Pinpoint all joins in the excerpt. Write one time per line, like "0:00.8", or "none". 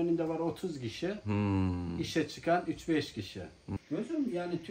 0:03.6